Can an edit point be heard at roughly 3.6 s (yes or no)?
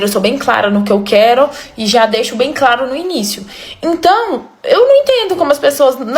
no